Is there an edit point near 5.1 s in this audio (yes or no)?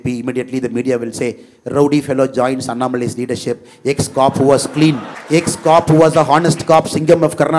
yes